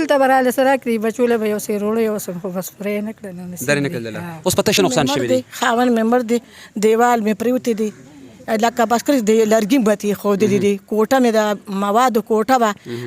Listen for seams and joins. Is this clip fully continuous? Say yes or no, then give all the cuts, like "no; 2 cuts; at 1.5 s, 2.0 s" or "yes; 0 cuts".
no; 1 cut; at 4.8 s